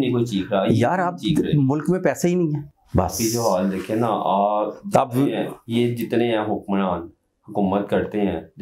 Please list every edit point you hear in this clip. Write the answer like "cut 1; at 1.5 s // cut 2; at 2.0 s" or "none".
cut 1; at 2.7 s